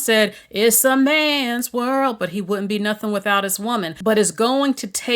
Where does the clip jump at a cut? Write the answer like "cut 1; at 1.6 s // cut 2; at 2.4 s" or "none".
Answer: cut 1; at 3.9 s